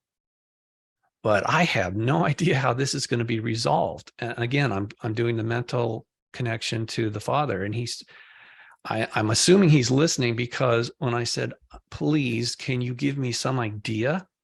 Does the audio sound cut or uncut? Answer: uncut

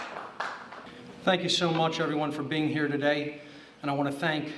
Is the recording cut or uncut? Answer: cut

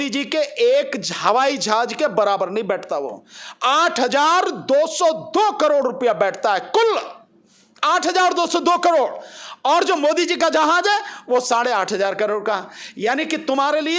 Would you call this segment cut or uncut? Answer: uncut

